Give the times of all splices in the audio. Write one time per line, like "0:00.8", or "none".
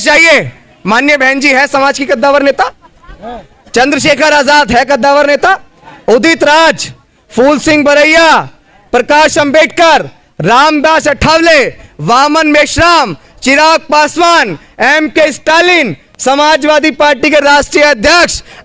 none